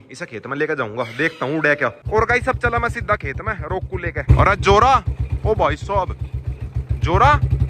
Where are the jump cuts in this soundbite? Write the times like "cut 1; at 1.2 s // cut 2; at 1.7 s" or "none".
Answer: cut 1; at 2.0 s